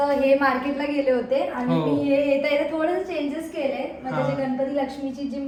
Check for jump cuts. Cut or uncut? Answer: uncut